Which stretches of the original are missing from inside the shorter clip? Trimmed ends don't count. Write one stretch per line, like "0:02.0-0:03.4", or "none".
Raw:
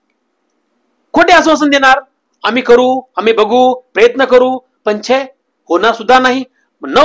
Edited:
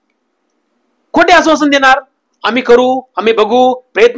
none